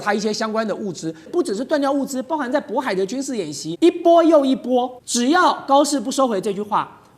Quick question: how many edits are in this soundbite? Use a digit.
3